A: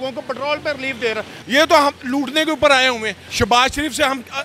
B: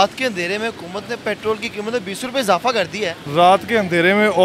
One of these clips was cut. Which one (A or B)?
A